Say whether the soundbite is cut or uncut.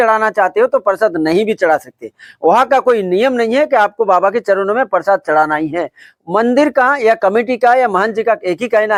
uncut